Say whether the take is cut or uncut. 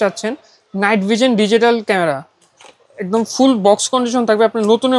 uncut